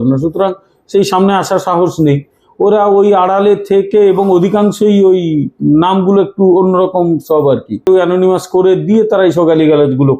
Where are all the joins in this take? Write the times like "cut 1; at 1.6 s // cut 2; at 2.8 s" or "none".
cut 1; at 7.9 s